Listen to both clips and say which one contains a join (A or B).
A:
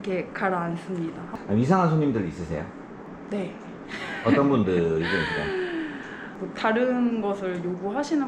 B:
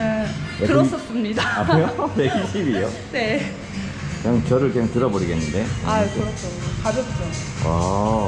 A